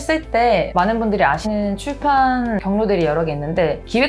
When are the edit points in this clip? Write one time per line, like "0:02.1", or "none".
0:01.4
0:02.6